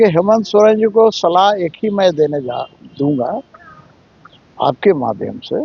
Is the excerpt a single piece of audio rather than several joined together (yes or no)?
yes